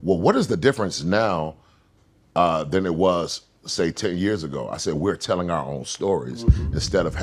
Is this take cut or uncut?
uncut